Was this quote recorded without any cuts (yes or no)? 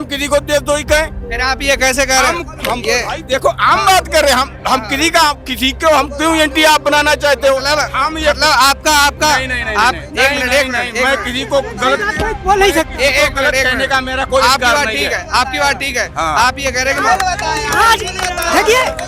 yes